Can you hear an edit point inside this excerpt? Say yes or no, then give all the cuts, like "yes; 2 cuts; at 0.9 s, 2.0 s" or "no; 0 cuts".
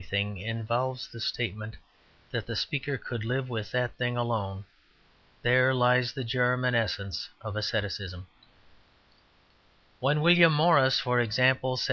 no; 0 cuts